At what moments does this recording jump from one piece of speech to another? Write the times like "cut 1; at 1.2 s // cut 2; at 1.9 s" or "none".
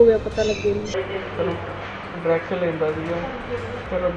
cut 1; at 1.0 s